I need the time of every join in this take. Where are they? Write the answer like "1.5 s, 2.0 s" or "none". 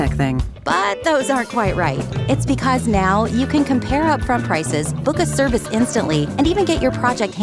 none